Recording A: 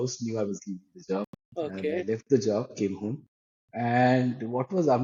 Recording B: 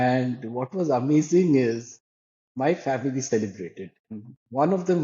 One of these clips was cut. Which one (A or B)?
B